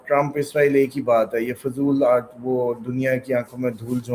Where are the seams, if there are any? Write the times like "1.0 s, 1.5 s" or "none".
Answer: none